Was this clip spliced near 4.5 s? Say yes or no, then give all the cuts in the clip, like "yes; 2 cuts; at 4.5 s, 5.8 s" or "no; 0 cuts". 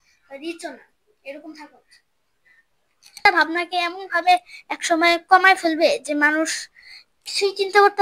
no; 1 cut; at 3.2 s